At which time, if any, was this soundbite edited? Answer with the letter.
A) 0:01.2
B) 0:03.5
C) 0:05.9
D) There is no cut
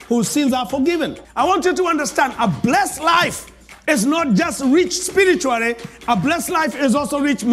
A